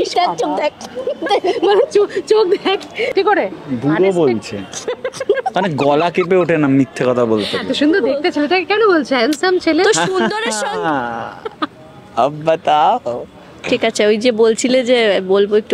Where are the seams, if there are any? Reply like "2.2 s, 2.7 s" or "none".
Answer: 3.1 s